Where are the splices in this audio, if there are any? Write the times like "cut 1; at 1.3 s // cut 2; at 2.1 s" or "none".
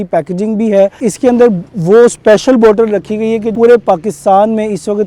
cut 1; at 1.0 s // cut 2; at 3.5 s